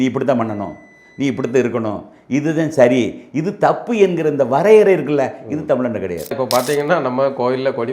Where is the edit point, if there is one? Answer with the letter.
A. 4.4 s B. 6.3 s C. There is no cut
B